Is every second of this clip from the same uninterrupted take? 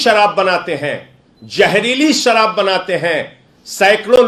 yes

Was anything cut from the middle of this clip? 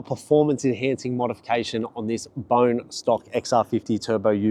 no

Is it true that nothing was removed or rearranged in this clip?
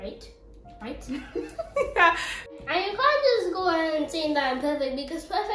no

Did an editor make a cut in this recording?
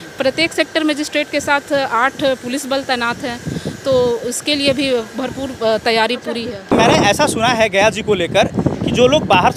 no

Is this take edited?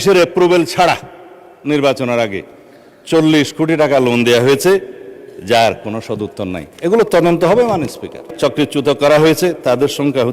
yes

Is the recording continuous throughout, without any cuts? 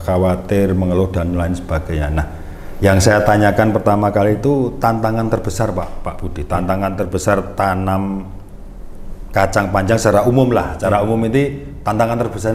yes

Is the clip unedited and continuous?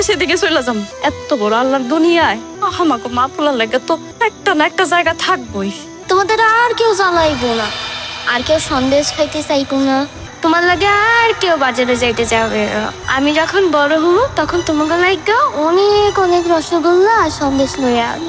no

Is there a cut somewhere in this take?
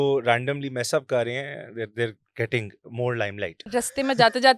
yes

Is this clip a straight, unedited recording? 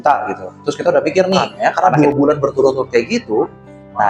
no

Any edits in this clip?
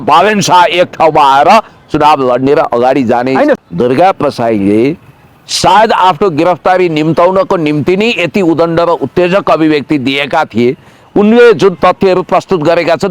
yes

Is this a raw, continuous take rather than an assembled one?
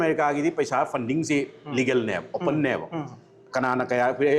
yes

